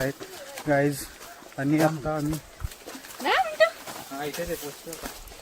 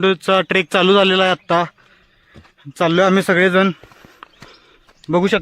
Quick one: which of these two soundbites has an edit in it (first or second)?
first